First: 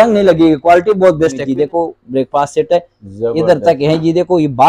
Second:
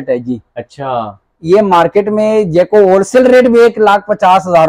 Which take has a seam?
first; 1 cut; at 1.5 s

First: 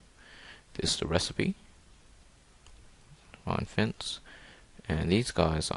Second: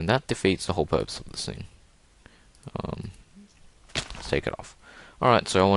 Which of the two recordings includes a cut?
second; 1 cut; at 3.2 s

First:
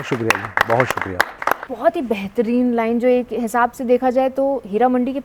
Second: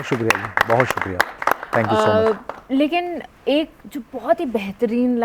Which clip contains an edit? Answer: first; 1 cut; at 1.6 s

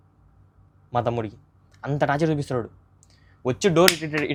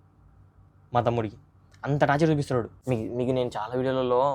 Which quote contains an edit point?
second; 1 cut; at 2.8 s

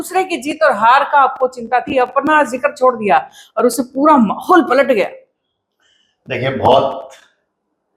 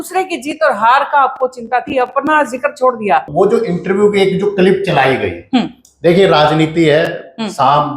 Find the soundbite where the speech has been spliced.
second; 1 cut; at 3.3 s

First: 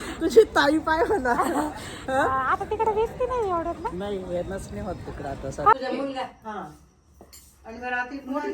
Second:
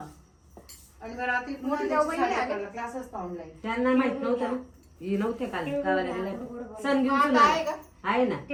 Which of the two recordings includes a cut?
first; 1 cut; at 5.7 s

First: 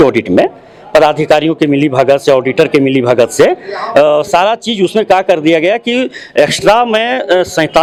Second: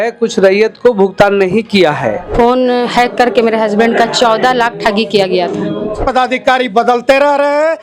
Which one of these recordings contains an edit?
second; 2 cuts; at 2.2 s, 6.0 s

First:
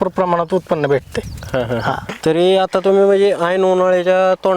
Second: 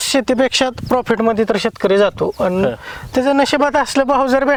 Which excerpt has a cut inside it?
first; 1 cut; at 2.1 s

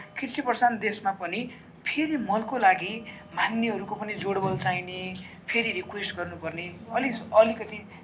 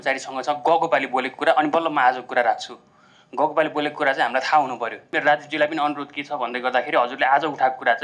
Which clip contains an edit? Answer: second; 1 cut; at 5.1 s

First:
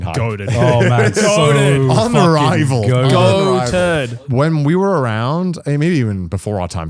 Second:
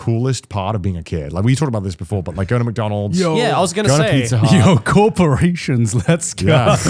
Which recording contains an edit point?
first; 1 cut; at 4.2 s

